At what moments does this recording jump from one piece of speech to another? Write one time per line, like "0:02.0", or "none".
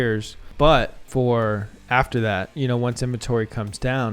0:01.0